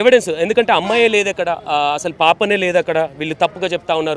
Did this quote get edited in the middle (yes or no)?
no